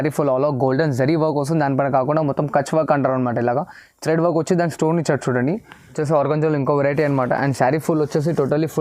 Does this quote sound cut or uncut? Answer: cut